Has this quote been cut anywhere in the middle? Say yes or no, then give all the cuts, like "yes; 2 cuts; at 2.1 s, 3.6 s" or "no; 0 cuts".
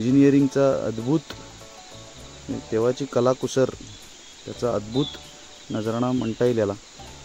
no; 0 cuts